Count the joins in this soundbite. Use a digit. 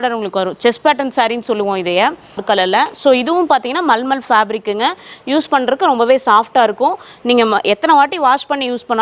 1